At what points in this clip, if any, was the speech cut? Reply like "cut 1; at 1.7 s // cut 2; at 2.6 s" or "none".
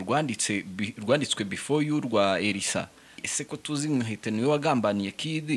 cut 1; at 3.2 s